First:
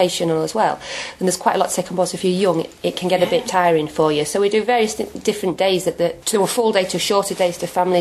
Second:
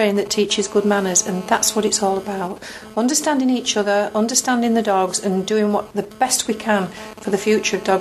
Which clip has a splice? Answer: first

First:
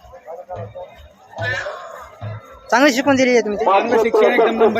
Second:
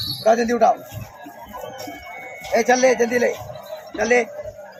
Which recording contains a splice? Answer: first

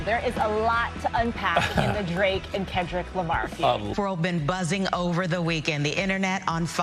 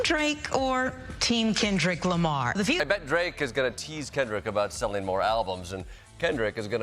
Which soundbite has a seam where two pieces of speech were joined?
second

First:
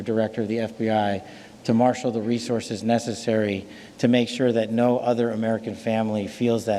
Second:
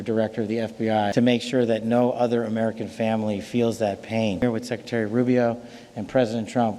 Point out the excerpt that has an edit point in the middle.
second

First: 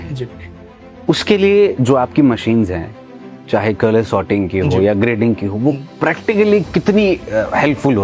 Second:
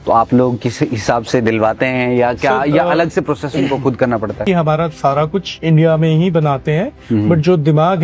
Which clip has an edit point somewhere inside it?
second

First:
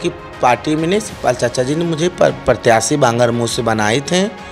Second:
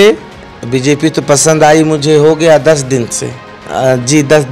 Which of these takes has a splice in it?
second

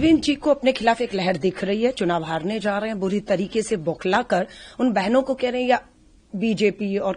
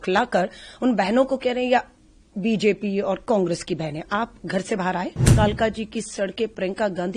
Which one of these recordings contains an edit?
second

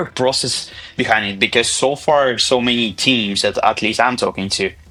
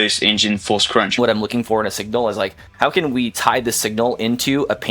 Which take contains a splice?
second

